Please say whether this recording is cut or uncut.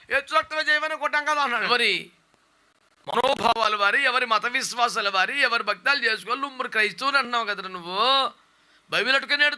cut